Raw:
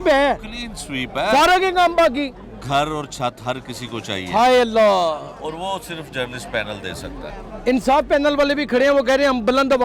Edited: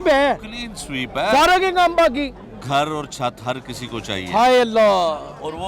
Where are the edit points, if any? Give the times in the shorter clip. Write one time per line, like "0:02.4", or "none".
none